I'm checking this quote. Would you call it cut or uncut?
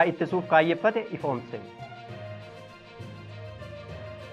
cut